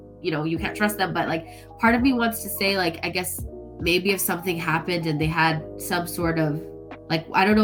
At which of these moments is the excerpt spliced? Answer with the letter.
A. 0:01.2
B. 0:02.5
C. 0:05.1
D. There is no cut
D